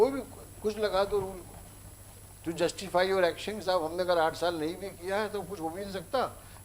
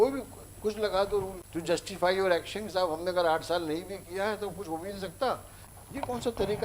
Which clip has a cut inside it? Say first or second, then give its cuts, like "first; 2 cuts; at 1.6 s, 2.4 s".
second; 2 cuts; at 1.5 s, 5.6 s